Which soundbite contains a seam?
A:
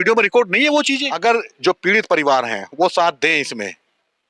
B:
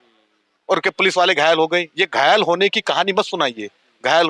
A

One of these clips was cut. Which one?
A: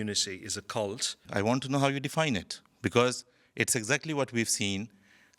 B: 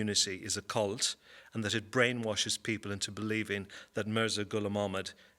A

